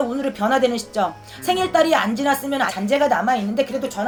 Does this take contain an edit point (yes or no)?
no